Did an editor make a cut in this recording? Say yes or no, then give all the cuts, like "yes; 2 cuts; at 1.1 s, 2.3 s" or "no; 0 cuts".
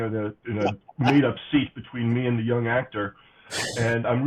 no; 0 cuts